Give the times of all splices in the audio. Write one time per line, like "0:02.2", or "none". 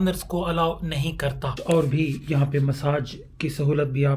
0:01.6